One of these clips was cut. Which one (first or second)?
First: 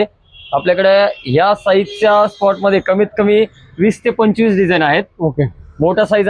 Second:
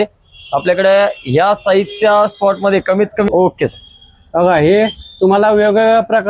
second